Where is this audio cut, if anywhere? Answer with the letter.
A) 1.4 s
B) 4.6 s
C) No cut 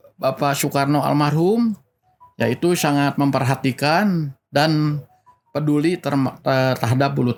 C